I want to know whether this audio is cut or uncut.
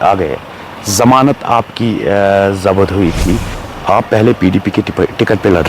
cut